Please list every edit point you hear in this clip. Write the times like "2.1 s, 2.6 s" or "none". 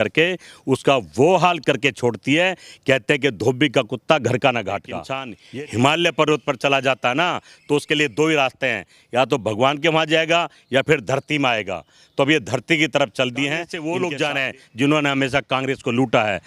5.3 s, 13.7 s